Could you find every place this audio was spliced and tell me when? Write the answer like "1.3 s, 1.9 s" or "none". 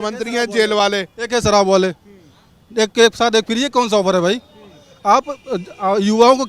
none